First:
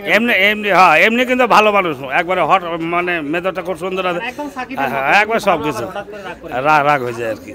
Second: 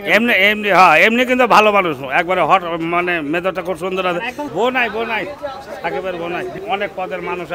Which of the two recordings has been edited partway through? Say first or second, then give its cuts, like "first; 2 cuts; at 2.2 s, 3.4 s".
second; 2 cuts; at 4.5 s, 6.6 s